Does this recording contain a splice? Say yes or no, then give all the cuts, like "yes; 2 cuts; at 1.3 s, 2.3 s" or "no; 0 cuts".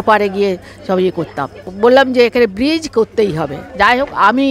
yes; 1 cut; at 1.7 s